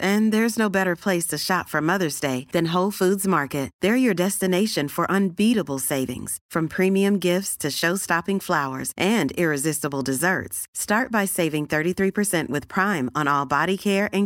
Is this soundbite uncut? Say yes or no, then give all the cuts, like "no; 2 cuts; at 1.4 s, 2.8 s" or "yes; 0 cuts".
yes; 0 cuts